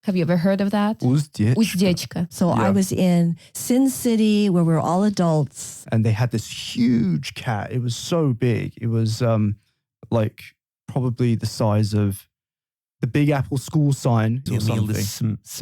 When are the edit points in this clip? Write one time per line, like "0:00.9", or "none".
0:02.3
0:05.6
0:14.4